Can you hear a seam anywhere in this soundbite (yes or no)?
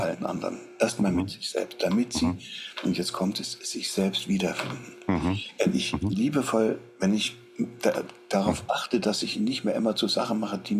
no